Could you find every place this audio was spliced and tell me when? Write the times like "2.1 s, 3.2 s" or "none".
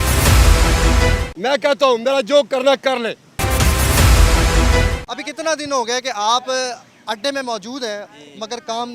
1.3 s, 3.4 s, 5.0 s

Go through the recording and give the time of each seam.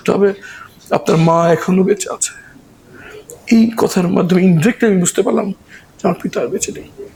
none

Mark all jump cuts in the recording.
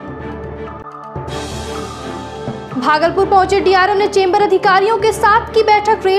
2.6 s

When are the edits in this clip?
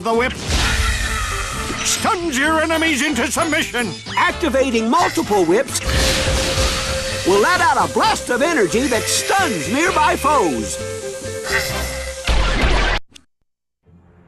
2.3 s

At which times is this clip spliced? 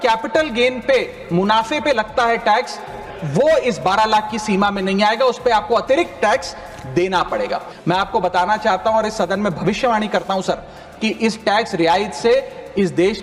7.7 s

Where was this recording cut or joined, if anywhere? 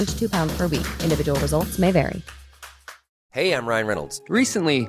3.0 s

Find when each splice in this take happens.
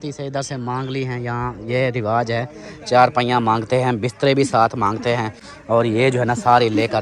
none

